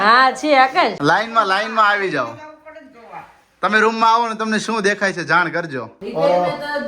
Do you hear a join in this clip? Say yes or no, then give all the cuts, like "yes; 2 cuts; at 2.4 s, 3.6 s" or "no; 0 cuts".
yes; 2 cuts; at 1.0 s, 6.0 s